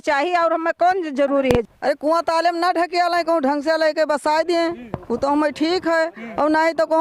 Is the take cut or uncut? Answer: cut